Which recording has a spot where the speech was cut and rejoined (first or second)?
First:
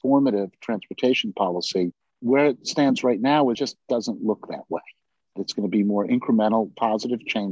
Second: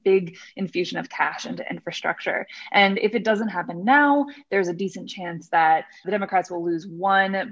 first